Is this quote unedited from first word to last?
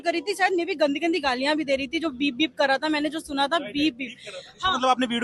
yes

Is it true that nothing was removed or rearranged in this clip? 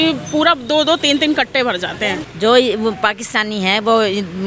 no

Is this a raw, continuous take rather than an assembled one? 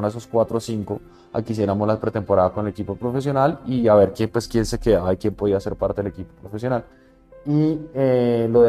no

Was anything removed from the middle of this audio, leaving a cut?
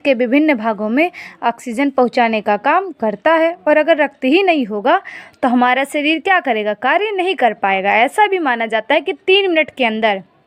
no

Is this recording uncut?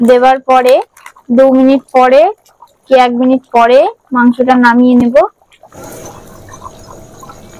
no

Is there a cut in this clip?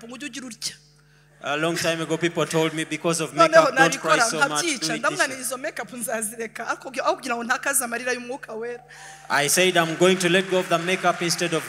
no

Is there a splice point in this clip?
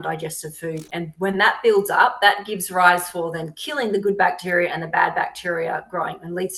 no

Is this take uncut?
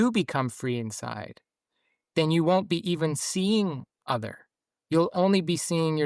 yes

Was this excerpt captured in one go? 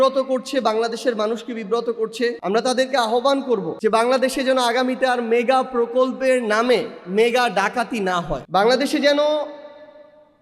no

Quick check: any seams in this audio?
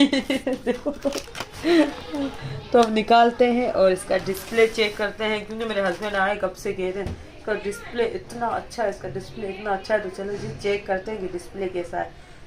no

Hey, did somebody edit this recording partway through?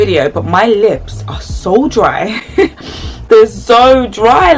no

